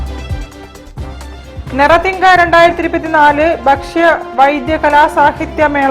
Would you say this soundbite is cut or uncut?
cut